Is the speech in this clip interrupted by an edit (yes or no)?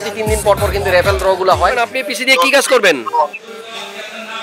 yes